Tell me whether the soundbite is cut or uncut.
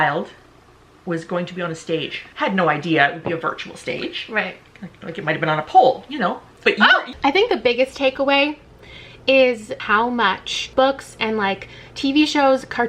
cut